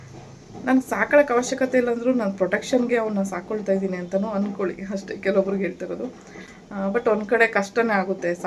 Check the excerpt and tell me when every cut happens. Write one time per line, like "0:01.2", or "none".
none